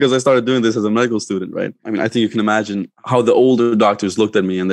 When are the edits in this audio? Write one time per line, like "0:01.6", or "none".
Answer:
0:01.8
0:03.0